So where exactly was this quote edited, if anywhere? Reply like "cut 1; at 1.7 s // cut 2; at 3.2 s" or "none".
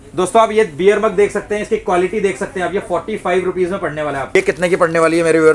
cut 1; at 4.3 s